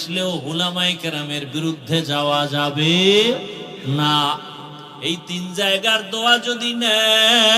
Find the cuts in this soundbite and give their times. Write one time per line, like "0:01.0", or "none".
none